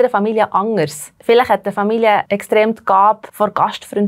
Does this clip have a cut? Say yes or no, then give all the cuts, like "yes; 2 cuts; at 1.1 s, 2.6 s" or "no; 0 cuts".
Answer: yes; 3 cuts; at 1.1 s, 2.3 s, 3.3 s